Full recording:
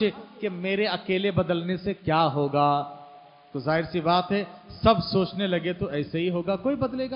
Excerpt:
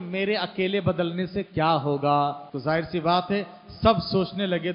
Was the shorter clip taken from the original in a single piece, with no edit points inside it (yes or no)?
no